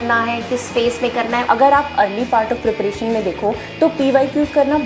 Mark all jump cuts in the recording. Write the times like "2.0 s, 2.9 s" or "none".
1.4 s